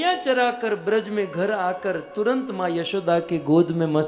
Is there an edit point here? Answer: no; 0 cuts

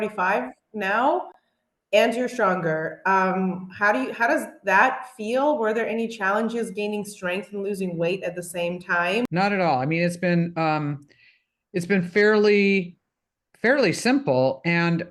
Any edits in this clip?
no; 0 cuts

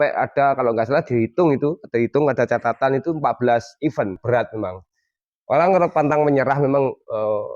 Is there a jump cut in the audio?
yes; 1 cut; at 4.2 s

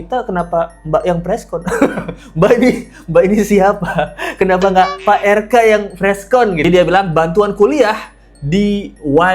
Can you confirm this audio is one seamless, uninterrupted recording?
no; 1 cut; at 6.6 s

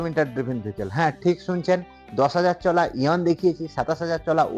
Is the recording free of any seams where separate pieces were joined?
yes; 0 cuts

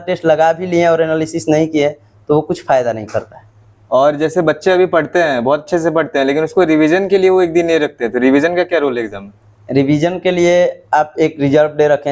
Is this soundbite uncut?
yes; 0 cuts

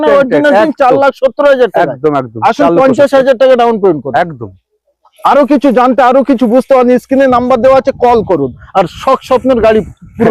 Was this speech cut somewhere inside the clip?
no; 0 cuts

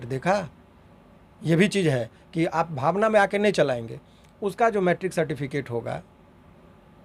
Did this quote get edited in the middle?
no; 0 cuts

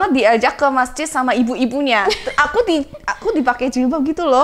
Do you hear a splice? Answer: no; 0 cuts

